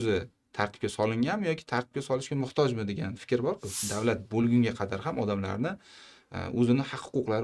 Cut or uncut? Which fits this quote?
cut